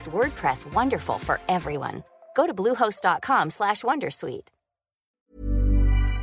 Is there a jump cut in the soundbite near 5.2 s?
yes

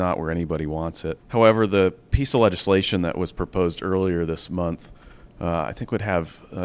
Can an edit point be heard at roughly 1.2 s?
yes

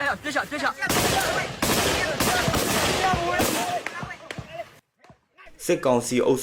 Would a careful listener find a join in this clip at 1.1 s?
no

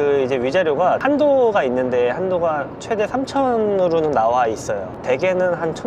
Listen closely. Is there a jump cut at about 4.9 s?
yes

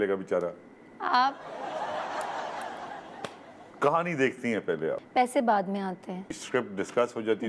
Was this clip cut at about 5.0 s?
yes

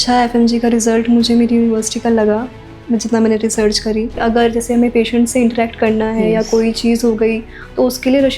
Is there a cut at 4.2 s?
yes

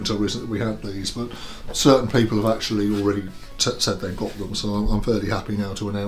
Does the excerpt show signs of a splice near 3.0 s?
no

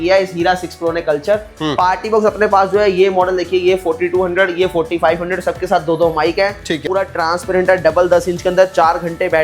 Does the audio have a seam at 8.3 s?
no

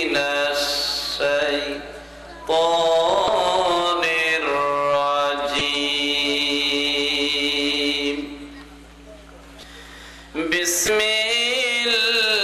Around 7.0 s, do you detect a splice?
no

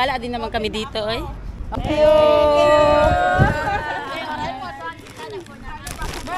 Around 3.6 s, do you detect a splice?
no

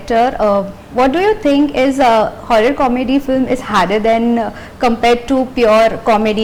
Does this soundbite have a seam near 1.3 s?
no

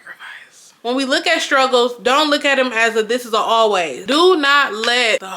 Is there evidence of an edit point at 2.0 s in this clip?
no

